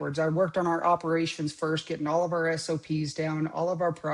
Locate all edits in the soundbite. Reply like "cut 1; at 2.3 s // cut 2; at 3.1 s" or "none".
none